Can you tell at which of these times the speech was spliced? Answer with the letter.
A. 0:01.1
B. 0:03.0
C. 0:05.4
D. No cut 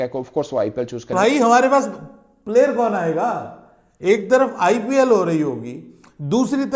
A